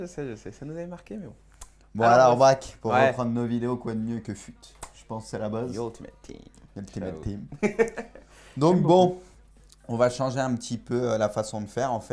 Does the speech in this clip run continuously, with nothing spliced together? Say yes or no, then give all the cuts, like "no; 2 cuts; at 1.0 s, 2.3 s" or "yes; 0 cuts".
no; 1 cut; at 4.0 s